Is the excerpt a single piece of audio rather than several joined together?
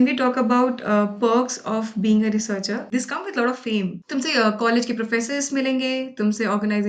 no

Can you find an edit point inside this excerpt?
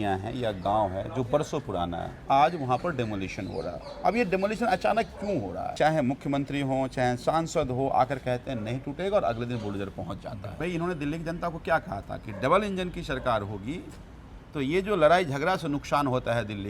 yes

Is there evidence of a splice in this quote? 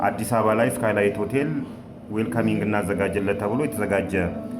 no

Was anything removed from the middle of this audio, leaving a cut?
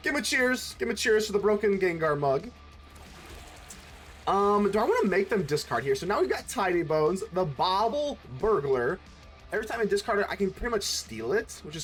no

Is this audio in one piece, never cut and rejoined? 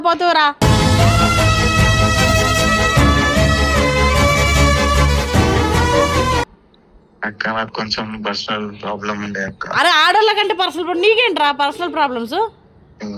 yes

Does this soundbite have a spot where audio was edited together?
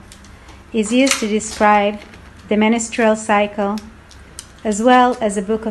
no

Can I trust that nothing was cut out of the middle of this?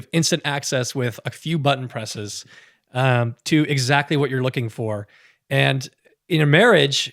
yes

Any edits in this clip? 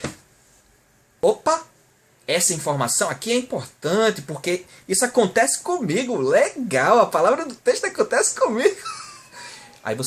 yes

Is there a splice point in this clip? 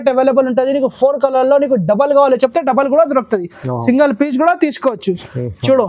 no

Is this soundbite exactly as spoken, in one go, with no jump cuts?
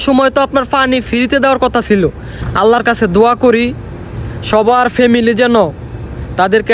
no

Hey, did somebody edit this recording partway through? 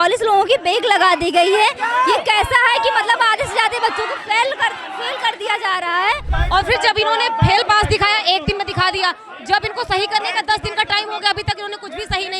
yes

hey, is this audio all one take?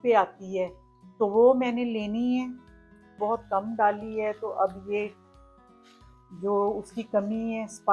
no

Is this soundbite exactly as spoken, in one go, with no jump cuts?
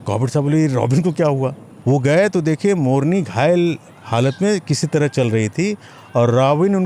no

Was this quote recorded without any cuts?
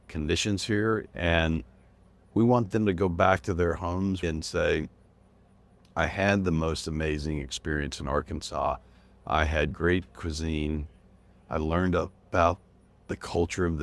no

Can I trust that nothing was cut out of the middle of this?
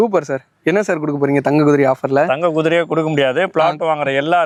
yes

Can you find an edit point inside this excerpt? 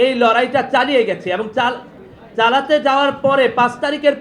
no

